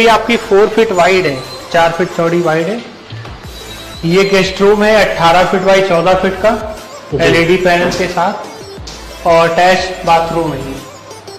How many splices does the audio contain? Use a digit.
0